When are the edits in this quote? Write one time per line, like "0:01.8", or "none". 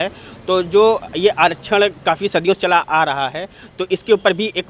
none